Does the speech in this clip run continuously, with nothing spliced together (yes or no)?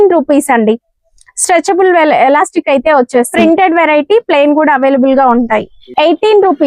no